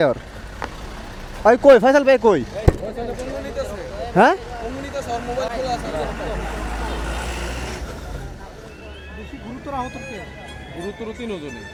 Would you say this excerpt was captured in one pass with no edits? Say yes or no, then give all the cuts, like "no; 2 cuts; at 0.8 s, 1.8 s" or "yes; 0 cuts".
yes; 0 cuts